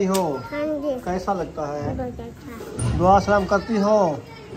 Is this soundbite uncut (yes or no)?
yes